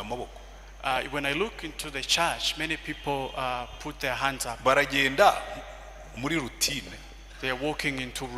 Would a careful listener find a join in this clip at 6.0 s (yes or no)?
no